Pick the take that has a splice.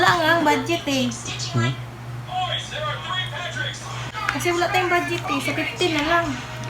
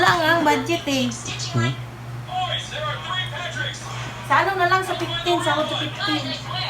first; 1 cut; at 4.1 s

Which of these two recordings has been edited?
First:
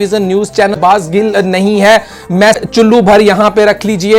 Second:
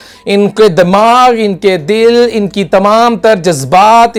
first; 2 cuts; at 0.9 s, 2.6 s

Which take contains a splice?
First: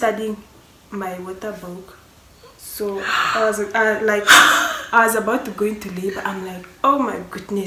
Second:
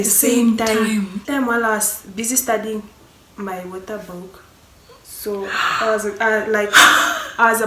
second; 1 cut; at 1.2 s

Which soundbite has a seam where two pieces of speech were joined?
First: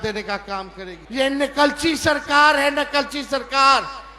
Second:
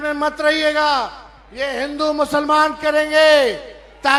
first; 1 cut; at 1.0 s

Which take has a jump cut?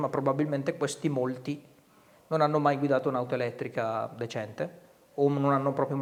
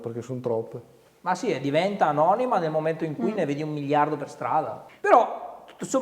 second; 1 cut; at 4.8 s

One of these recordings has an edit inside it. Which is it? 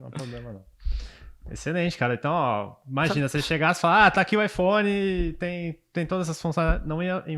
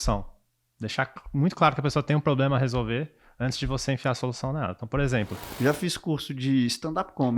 second; 1 cut; at 5.4 s

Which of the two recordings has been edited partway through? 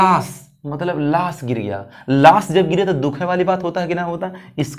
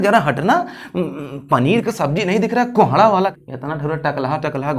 second; 1 cut; at 3.3 s

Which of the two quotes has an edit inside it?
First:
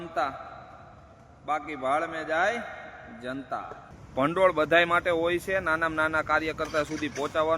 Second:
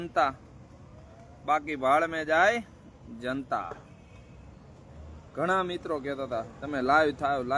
first; 1 cut; at 3.9 s

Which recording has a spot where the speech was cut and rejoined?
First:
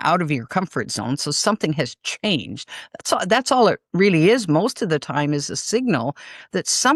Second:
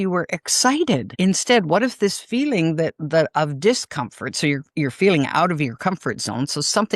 second; 1 cut; at 1.1 s

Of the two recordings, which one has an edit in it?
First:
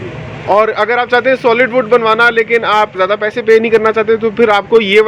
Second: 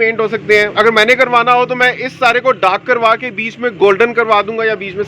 first; 1 cut; at 2.9 s

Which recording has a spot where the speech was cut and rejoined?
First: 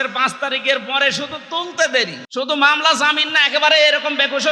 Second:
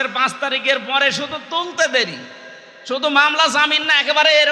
first; 1 cut; at 2.2 s

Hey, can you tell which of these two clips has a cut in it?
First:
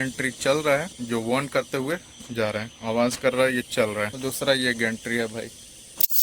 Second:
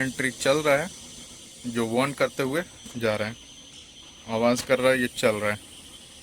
first; 3 cuts; at 0.9 s, 2.7 s, 4.1 s

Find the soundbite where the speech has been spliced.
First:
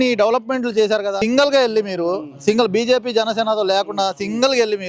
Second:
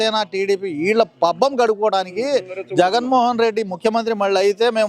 first; 1 cut; at 1.2 s

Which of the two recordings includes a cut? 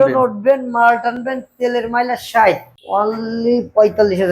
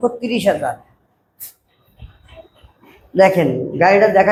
first; 1 cut; at 2.7 s

